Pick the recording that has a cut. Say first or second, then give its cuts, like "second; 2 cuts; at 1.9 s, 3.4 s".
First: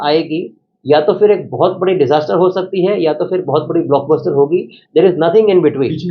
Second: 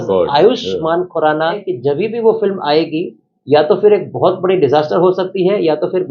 second; 1 cut; at 1.5 s